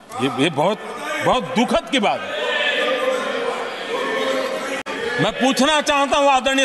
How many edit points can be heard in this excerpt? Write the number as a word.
zero